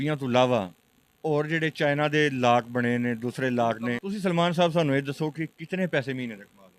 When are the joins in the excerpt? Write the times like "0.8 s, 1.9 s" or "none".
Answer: 4.0 s